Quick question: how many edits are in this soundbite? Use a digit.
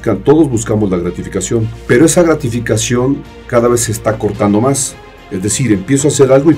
1